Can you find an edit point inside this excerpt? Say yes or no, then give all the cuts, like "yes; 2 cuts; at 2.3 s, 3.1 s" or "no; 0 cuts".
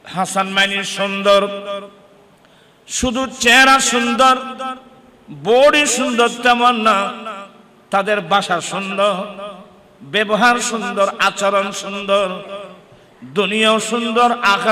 no; 0 cuts